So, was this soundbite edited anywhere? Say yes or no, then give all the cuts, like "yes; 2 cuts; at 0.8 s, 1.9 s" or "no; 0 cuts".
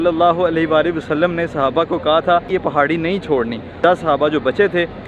yes; 2 cuts; at 2.5 s, 3.8 s